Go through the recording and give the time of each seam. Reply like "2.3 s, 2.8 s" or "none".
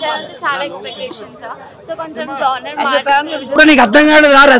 3.5 s